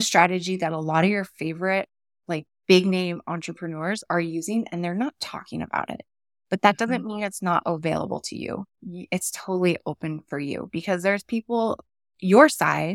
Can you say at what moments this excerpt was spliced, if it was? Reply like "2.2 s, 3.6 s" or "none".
8.7 s